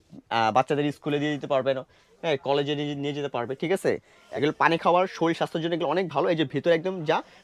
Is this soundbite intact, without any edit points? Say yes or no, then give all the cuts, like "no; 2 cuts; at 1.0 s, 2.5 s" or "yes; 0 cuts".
no; 1 cut; at 4.1 s